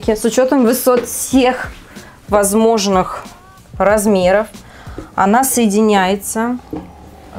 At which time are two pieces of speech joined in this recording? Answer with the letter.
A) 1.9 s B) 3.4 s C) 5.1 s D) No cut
D